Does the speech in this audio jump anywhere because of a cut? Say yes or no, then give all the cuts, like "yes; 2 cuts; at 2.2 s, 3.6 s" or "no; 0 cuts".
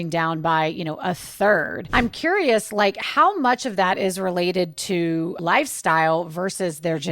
yes; 2 cuts; at 1.8 s, 5.4 s